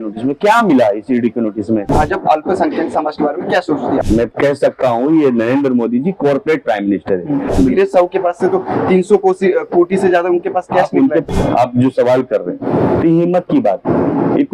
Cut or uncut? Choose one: cut